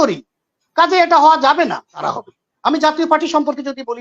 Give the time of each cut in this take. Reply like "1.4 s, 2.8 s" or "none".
2.0 s